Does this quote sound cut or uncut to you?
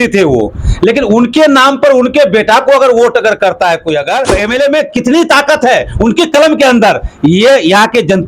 cut